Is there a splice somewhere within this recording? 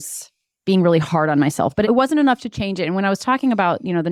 no; 0 cuts

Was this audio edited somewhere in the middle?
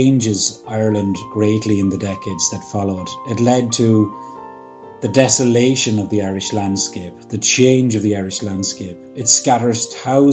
no; 0 cuts

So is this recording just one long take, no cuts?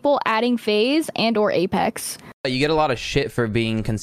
no; 1 cut; at 2.5 s

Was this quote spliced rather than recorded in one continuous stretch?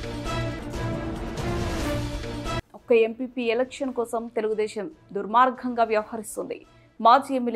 no; 0 cuts

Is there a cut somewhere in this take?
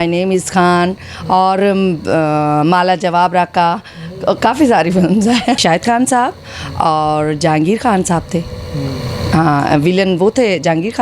yes; 1 cut; at 6.0 s

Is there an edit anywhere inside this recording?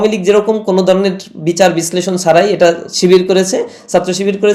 no; 0 cuts

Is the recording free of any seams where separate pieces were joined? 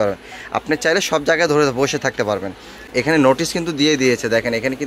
no; 1 cut; at 2.9 s

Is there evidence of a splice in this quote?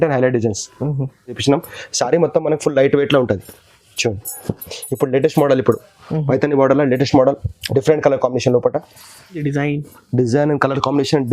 yes; 2 cuts; at 1.4 s, 9.4 s

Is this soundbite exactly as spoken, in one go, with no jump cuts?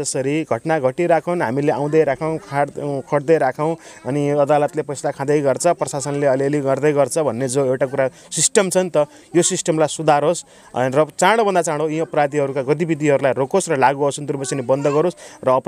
yes; 0 cuts

